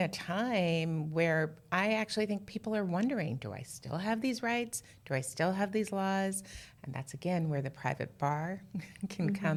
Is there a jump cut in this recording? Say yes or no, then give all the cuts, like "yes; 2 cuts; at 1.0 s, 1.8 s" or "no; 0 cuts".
no; 0 cuts